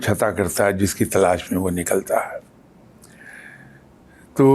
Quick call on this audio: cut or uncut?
uncut